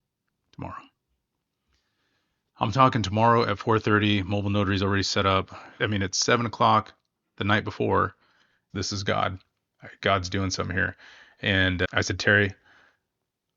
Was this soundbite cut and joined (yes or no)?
yes